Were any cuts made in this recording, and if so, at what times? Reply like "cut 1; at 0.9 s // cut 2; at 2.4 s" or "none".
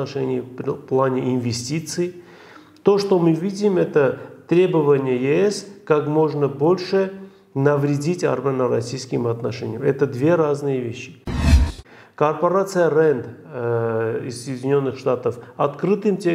cut 1; at 11.5 s